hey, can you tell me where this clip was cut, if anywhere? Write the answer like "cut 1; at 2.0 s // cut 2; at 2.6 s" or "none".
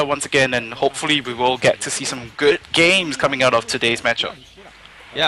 cut 1; at 1.2 s

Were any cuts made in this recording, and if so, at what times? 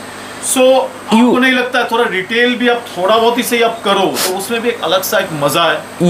none

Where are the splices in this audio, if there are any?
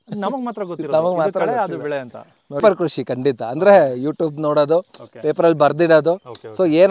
cut 1; at 2.6 s

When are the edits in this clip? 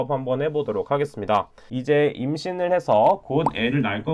cut 1; at 1.6 s

